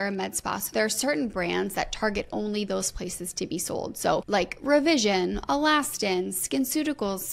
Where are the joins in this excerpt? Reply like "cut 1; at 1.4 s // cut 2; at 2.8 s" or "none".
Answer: cut 1; at 4.2 s